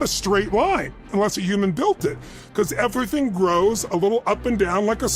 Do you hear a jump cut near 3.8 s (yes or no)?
no